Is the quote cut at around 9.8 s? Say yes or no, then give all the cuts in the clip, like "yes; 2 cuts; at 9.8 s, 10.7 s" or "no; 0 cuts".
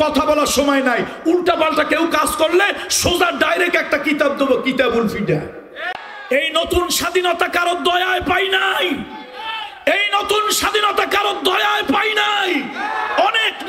no; 1 cut; at 6.2 s